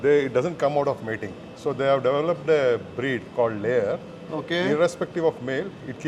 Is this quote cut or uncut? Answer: uncut